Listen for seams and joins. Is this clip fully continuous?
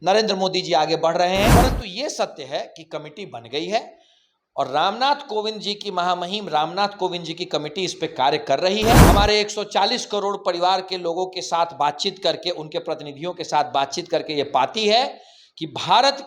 no; 2 cuts; at 1.5 s, 9.0 s

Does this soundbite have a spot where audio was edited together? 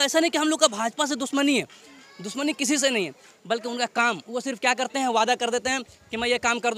no; 0 cuts

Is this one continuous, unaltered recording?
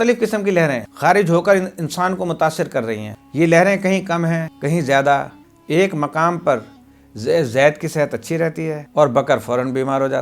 no; 1 cut; at 5.4 s

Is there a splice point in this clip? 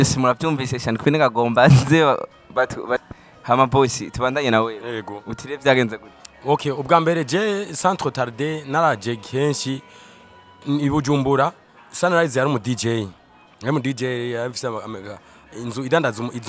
yes; 1 cut; at 3.0 s

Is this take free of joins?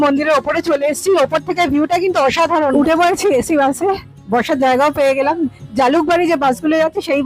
no; 1 cut; at 2.7 s

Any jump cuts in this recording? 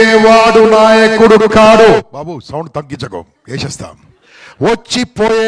no; 0 cuts

